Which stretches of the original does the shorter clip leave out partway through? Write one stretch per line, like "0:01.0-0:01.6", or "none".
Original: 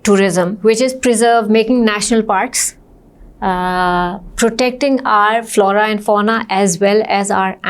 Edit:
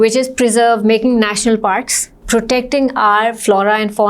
0:02.8-0:04.2